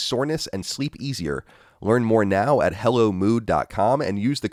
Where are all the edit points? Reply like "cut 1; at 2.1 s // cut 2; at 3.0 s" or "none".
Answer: none